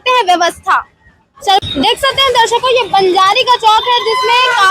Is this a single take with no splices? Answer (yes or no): no